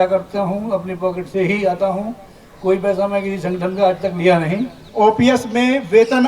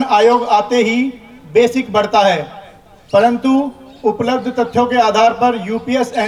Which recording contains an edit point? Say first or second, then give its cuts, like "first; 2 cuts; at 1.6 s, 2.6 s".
first; 1 cut; at 4.8 s